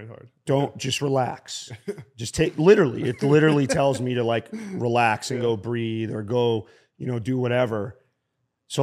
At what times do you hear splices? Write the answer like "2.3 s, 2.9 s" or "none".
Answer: none